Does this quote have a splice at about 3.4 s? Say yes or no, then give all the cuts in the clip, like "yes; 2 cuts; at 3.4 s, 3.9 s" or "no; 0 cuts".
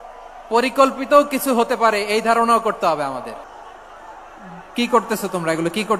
yes; 1 cut; at 3.4 s